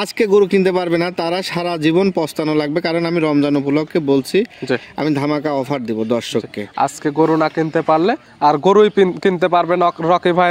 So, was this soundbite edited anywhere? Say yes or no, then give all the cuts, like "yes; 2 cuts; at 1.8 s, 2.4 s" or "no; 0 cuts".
no; 0 cuts